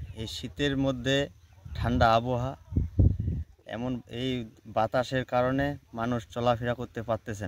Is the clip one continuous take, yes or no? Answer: yes